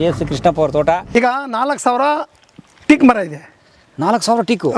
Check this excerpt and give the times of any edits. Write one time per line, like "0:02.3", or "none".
0:01.1